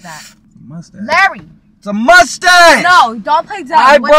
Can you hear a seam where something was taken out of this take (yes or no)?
no